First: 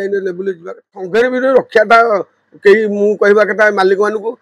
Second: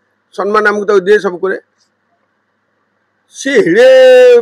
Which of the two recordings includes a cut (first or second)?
first